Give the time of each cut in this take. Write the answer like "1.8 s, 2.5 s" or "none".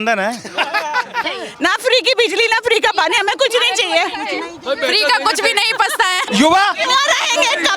1.2 s, 6.2 s